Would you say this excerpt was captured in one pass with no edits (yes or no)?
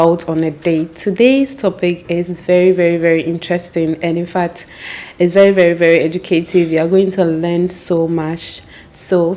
yes